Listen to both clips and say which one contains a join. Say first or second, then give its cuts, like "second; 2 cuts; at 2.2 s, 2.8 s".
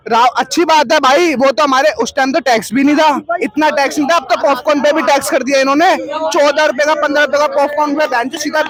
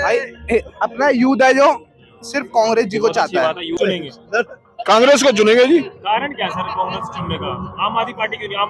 second; 1 cut; at 3.8 s